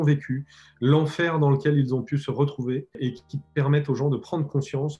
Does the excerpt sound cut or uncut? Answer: cut